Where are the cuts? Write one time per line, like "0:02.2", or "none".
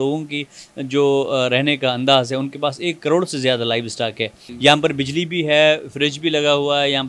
0:04.4